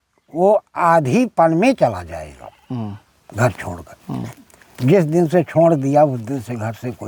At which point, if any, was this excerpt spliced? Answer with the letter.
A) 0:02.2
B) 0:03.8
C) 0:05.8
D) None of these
D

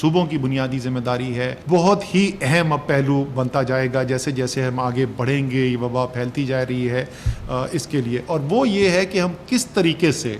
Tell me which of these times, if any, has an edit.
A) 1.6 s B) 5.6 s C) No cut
A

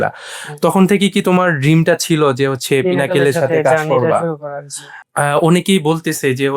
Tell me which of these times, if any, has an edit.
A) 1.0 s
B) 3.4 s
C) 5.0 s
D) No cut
C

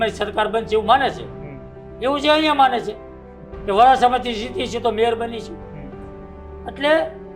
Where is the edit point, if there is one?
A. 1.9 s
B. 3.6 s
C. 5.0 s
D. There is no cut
D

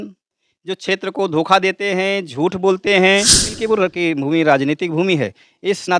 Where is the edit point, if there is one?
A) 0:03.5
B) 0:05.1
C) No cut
A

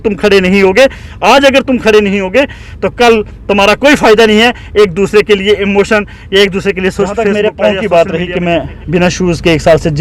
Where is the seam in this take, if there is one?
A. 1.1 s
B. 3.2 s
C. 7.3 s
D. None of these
C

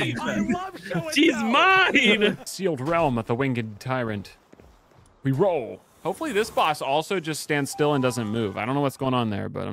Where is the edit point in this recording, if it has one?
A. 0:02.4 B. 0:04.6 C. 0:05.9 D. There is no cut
A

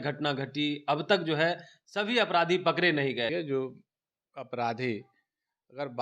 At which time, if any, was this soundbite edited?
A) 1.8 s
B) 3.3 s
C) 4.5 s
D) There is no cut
B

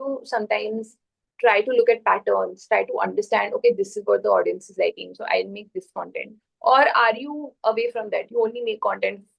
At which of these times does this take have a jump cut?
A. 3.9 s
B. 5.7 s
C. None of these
C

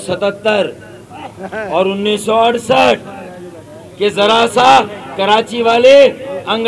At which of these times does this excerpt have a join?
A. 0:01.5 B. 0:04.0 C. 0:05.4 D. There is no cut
D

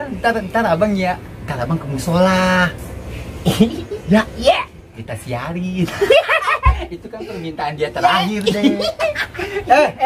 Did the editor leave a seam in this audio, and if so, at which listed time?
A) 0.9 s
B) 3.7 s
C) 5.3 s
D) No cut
D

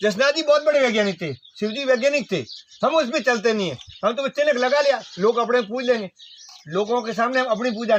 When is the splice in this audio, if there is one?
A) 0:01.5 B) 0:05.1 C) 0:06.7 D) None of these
D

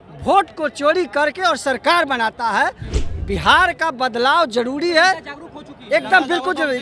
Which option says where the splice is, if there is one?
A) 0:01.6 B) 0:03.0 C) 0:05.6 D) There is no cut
B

